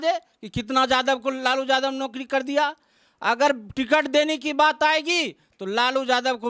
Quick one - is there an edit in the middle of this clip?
no; 0 cuts

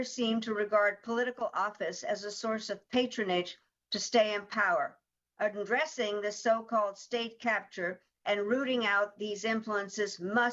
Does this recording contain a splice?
no; 0 cuts

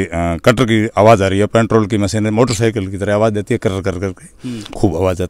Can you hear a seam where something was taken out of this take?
no; 0 cuts

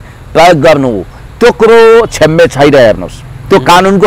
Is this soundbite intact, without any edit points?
yes; 0 cuts

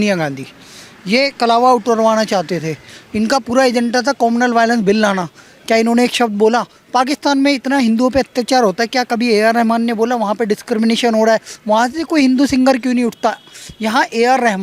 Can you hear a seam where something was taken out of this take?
no; 0 cuts

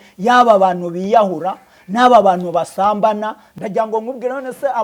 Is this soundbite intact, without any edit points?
no; 1 cut; at 3.4 s

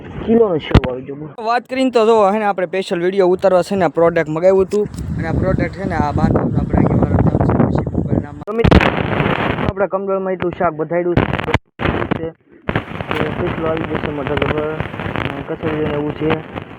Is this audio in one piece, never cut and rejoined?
no; 2 cuts; at 1.3 s, 8.4 s

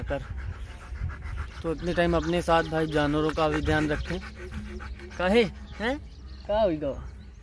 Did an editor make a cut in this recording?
no; 0 cuts

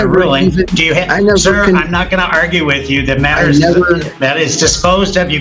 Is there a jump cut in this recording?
no; 0 cuts

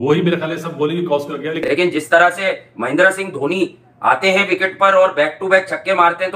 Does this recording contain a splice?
yes; 1 cut; at 1.6 s

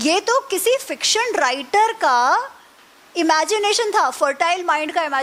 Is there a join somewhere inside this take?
no; 0 cuts

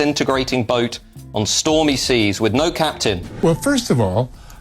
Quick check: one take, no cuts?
no; 1 cut; at 3.3 s

